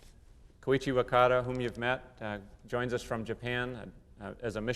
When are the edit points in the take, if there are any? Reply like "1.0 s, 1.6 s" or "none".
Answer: none